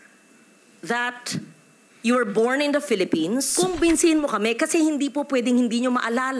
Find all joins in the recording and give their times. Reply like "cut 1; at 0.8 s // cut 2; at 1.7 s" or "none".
cut 1; at 3.5 s